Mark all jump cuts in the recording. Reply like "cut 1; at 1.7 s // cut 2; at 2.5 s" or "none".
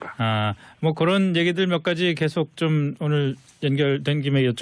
cut 1; at 2.4 s

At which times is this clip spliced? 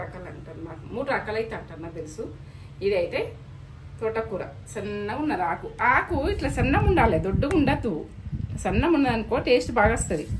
none

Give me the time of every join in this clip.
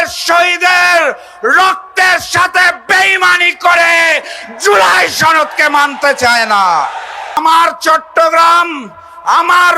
cut 1; at 7.4 s

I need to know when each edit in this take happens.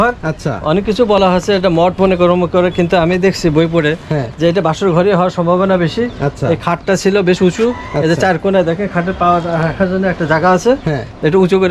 none

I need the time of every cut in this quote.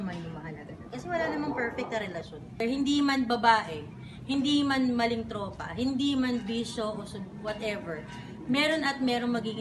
cut 1; at 2.6 s

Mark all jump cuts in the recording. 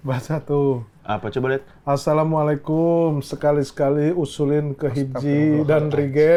none

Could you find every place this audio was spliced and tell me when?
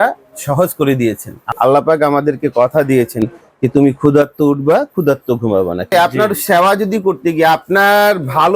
cut 1; at 1.4 s // cut 2; at 5.9 s

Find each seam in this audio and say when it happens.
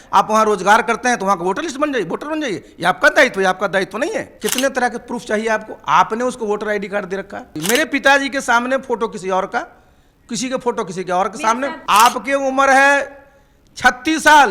cut 1; at 4.3 s // cut 2; at 7.5 s // cut 3; at 11.8 s

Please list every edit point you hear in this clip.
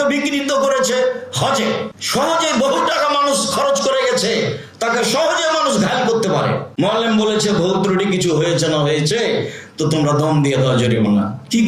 cut 1; at 2.0 s // cut 2; at 6.7 s

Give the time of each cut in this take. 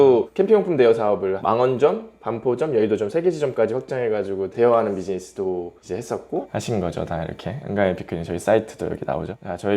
cut 1; at 6.5 s

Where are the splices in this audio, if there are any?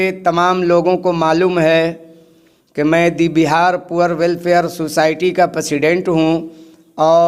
none

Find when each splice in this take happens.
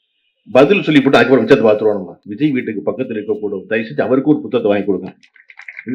cut 1; at 2.2 s

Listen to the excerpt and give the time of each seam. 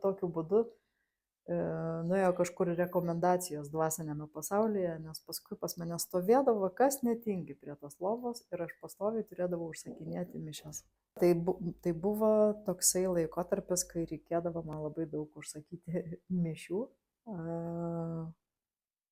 none

